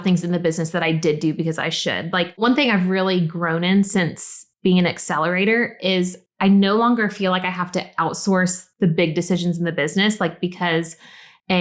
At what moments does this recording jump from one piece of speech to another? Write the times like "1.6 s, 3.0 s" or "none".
2.4 s